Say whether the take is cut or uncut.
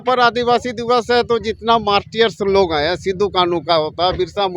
uncut